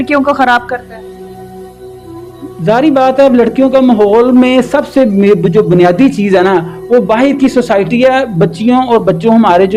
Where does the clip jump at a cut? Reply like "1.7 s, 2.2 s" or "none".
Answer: none